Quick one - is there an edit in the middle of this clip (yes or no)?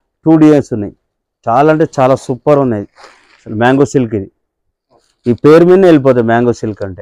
no